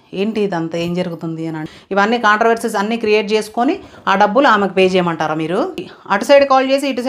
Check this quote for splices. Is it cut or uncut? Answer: cut